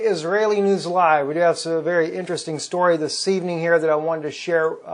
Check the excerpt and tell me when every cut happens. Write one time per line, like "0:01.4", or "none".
0:02.0